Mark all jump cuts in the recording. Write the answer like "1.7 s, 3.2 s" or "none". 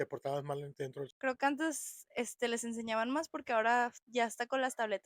1.1 s